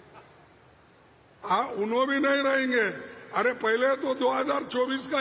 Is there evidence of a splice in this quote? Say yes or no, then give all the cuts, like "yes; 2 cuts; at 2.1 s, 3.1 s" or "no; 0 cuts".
no; 0 cuts